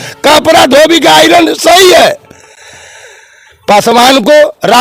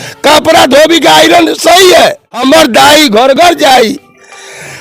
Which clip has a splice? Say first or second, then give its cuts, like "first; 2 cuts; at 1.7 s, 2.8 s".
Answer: second; 1 cut; at 2.3 s